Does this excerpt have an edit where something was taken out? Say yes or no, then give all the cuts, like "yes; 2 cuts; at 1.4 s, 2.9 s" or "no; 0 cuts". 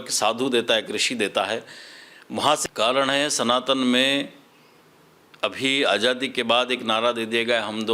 yes; 1 cut; at 2.6 s